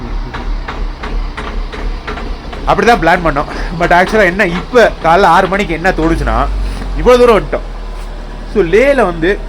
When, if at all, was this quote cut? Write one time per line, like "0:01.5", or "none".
none